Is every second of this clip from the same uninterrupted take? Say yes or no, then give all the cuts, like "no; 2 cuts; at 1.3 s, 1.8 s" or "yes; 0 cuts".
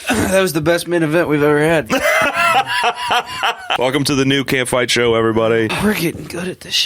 no; 2 cuts; at 3.8 s, 5.7 s